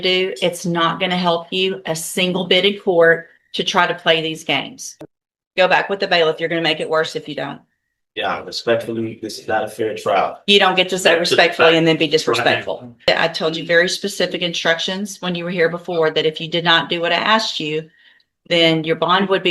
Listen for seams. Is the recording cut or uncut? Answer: cut